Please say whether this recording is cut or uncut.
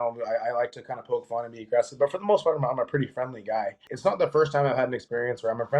cut